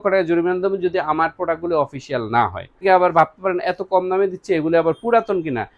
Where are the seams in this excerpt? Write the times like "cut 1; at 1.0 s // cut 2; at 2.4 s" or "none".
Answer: cut 1; at 2.8 s

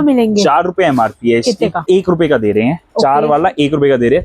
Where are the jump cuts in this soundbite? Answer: cut 1; at 1.8 s

